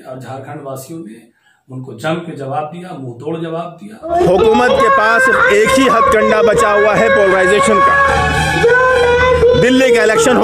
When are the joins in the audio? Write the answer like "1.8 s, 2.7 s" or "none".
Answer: 4.2 s